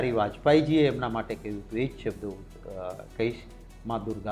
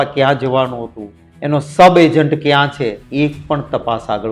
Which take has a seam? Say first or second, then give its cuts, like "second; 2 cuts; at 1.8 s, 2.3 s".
second; 1 cut; at 3.0 s